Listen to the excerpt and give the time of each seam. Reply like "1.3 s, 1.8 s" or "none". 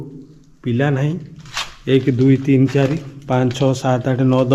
none